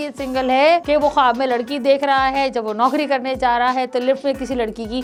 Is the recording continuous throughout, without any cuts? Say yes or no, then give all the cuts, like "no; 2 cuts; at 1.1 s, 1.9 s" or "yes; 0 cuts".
yes; 0 cuts